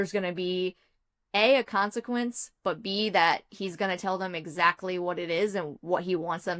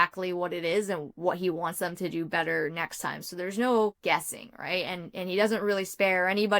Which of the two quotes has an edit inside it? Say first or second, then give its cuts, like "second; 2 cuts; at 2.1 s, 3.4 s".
second; 1 cut; at 4.0 s